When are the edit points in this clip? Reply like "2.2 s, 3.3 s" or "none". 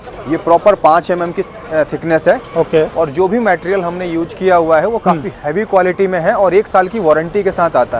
none